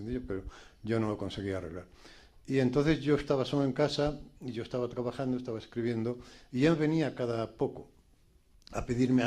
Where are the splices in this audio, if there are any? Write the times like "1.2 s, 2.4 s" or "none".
7.8 s